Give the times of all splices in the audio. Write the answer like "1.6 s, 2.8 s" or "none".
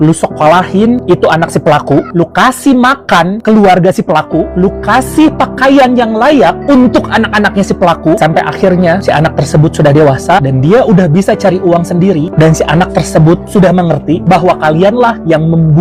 none